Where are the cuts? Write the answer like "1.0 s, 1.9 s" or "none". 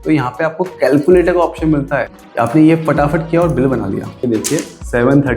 2.0 s, 4.2 s